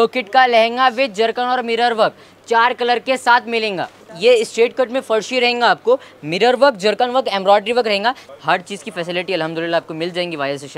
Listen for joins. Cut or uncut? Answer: cut